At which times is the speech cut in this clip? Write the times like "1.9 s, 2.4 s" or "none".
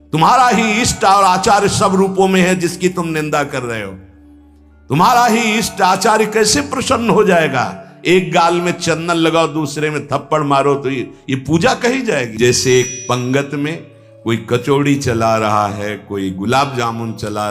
12.3 s